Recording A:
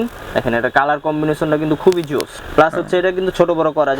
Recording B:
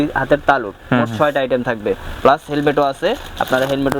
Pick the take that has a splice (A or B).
A